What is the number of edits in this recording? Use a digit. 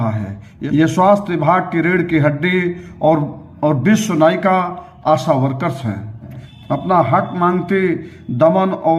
1